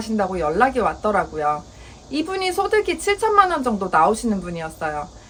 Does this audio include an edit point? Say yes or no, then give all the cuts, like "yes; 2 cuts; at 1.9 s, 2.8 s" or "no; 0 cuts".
no; 0 cuts